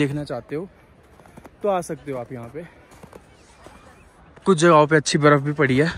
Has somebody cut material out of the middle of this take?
no; 0 cuts

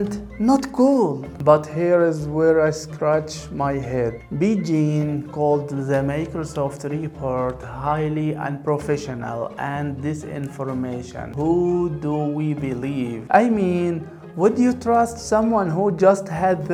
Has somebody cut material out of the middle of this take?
no; 0 cuts

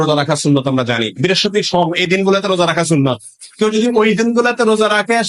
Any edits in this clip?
no; 0 cuts

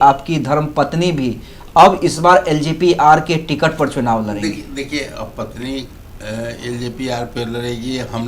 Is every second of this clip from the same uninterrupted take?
yes; 0 cuts

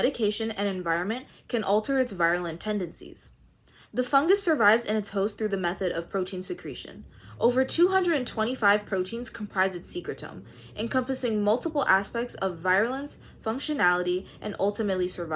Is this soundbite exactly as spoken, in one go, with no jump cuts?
yes; 0 cuts

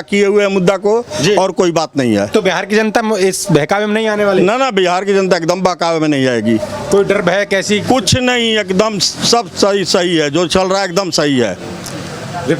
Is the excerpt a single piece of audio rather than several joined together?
yes; 0 cuts

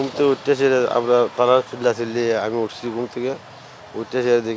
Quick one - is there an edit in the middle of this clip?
no; 0 cuts

